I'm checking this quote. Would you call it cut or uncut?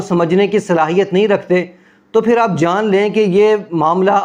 uncut